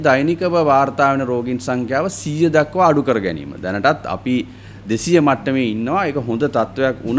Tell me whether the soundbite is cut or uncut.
uncut